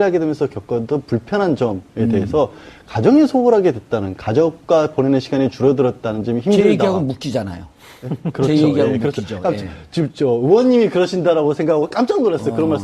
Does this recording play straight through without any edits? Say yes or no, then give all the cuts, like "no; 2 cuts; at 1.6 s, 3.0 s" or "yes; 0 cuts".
no; 1 cut; at 4.9 s